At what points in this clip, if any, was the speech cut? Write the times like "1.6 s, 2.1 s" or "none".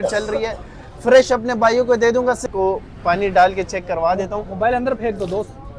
2.4 s